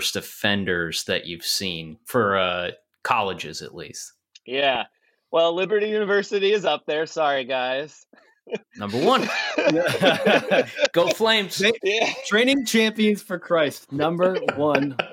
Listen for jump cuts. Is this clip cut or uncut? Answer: cut